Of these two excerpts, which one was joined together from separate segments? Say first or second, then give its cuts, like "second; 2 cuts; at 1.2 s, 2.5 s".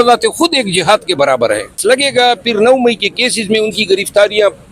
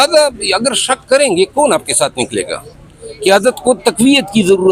first; 1 cut; at 1.8 s